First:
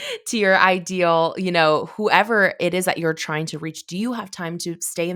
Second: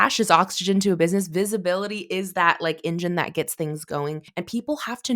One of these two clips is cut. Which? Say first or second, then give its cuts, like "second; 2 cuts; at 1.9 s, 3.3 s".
second; 1 cut; at 4.2 s